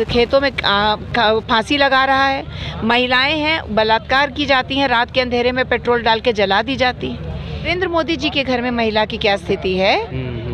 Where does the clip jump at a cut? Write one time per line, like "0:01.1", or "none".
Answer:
0:07.7